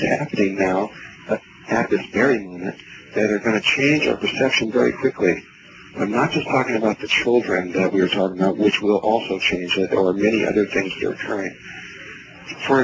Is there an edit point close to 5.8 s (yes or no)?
no